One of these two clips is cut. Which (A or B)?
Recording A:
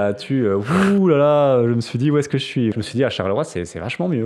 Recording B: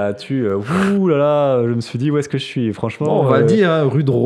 A